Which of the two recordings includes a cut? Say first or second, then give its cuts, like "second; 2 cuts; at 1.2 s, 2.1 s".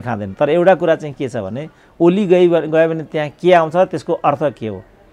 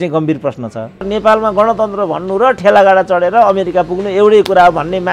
second; 1 cut; at 1.0 s